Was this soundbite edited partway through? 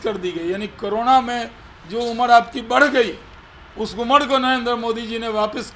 no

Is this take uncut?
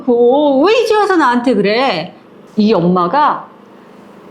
no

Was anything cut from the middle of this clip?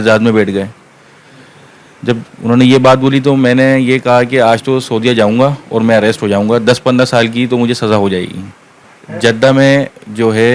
no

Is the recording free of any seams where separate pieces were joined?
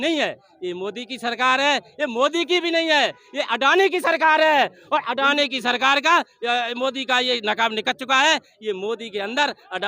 yes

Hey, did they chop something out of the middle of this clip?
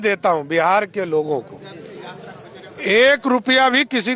no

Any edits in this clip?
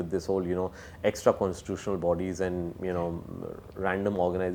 no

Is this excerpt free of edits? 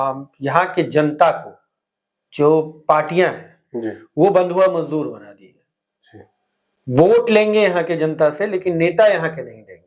yes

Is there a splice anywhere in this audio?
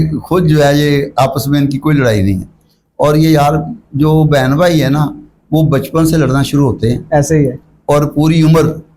no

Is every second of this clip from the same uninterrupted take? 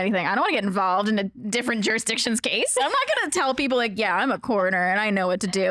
yes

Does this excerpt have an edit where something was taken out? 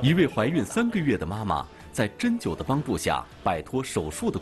no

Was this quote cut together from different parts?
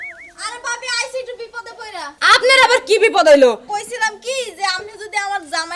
yes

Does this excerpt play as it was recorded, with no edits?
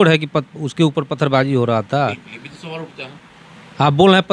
yes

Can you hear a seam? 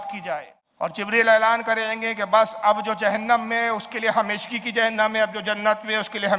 yes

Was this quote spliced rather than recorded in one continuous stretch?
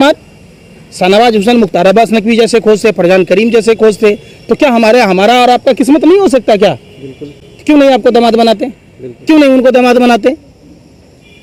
no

